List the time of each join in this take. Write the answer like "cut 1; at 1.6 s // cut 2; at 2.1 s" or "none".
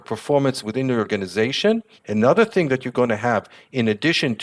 none